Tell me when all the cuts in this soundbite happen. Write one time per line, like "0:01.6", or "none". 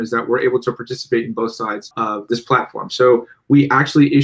0:02.2